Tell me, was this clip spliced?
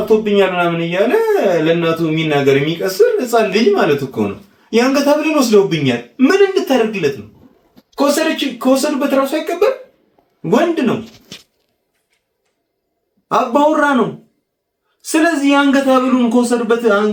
no; 0 cuts

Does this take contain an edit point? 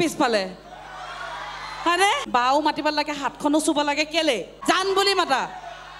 yes; 2 cuts; at 2.2 s, 4.5 s

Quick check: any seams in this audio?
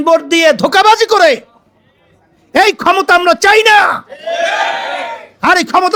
no; 0 cuts

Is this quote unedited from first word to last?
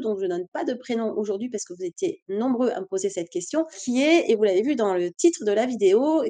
no; 1 cut; at 3.8 s

